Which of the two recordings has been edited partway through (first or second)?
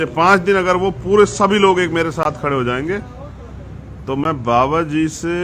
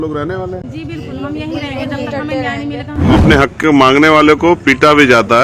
second